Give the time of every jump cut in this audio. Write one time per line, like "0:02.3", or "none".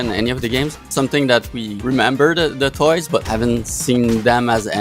0:00.8
0:01.7
0:03.2